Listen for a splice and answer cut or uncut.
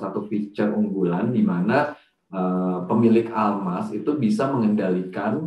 uncut